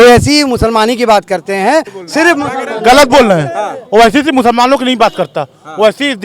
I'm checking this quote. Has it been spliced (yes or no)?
yes